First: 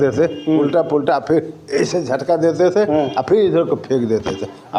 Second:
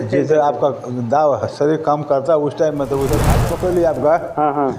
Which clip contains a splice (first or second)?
second